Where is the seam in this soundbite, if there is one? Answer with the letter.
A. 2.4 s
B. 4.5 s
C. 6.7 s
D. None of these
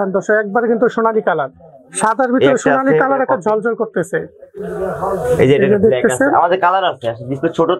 D